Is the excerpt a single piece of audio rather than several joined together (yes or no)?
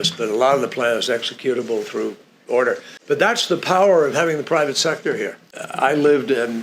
no